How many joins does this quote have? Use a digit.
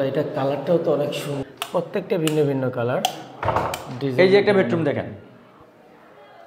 1